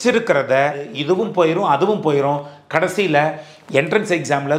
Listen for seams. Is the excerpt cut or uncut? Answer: cut